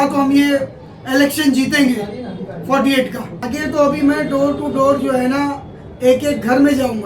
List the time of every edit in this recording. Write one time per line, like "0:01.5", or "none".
0:03.4